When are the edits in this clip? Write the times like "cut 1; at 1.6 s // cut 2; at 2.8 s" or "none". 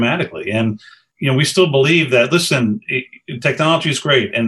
cut 1; at 1.1 s